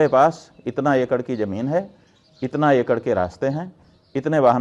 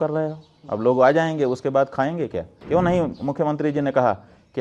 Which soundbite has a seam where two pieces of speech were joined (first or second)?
second